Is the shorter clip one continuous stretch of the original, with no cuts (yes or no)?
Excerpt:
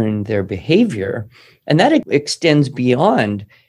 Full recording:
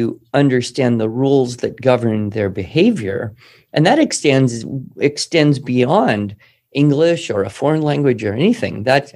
no